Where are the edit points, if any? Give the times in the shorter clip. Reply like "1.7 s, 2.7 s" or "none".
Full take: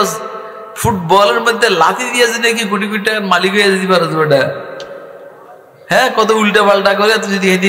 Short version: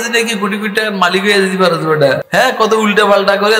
2.2 s